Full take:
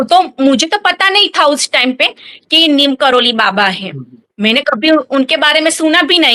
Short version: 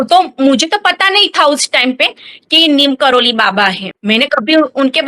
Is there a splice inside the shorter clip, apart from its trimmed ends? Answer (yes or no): yes